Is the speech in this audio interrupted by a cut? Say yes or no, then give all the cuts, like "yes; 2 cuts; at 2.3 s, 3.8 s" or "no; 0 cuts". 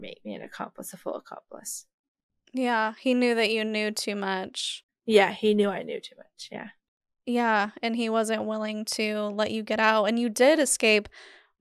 no; 0 cuts